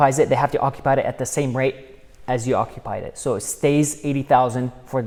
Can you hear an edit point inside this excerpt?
no; 0 cuts

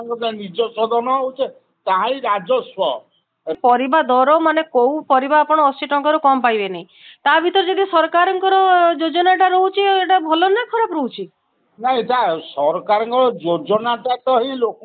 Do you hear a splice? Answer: yes; 1 cut; at 3.6 s

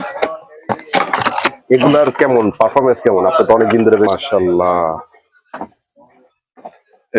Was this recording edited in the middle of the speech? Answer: yes; 1 cut; at 4.1 s

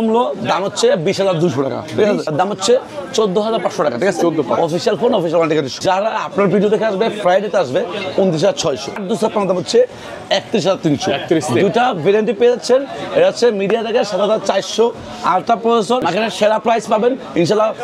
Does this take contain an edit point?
yes; 4 cuts; at 2.3 s, 5.7 s, 9.0 s, 16.0 s

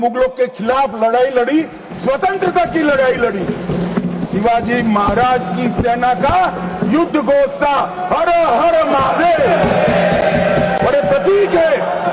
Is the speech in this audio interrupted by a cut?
yes; 1 cut; at 4.3 s

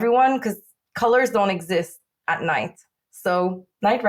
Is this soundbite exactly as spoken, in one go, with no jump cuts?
yes; 0 cuts

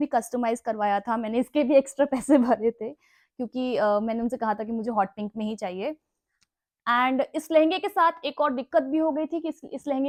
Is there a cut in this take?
no; 0 cuts

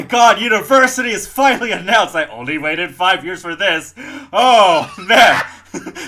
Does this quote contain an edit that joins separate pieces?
no; 0 cuts

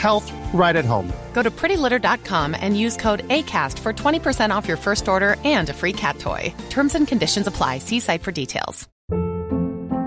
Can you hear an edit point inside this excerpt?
no; 0 cuts

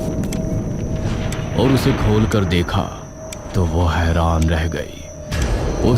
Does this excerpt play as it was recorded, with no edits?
no; 1 cut; at 1.5 s

